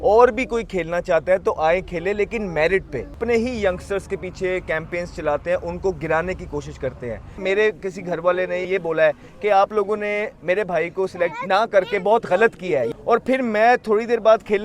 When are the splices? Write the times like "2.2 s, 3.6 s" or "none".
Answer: 3.2 s, 7.4 s, 8.6 s, 11.3 s, 12.9 s